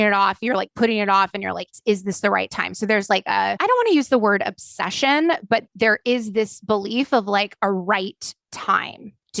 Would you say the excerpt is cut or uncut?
uncut